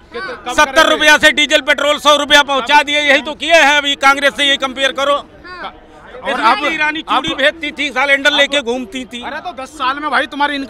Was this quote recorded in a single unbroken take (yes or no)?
yes